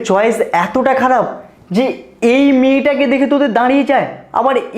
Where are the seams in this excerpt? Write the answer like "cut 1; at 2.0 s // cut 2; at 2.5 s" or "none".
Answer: cut 1; at 0.9 s // cut 2; at 3.9 s